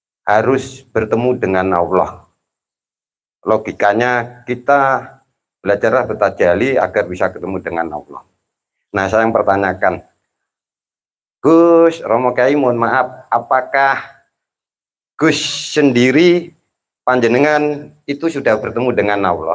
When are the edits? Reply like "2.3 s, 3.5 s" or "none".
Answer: none

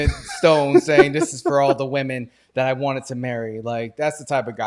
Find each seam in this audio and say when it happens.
none

